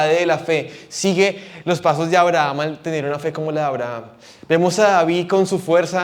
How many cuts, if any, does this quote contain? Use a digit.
0